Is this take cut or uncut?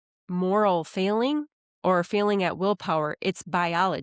uncut